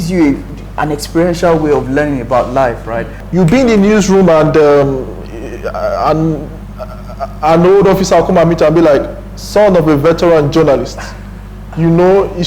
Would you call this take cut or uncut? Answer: cut